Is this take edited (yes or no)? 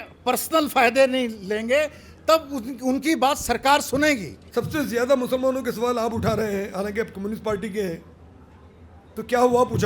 yes